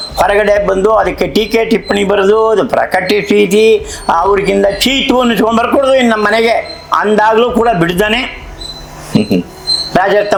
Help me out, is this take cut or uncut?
uncut